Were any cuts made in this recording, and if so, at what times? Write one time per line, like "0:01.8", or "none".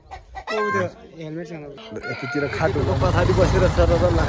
0:02.9